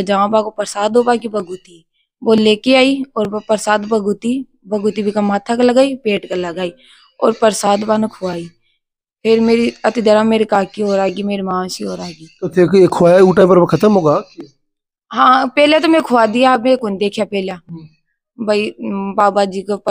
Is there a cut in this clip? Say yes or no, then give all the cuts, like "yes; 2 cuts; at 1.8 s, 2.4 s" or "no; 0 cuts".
no; 0 cuts